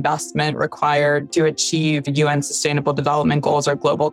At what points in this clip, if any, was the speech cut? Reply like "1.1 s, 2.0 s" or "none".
1.3 s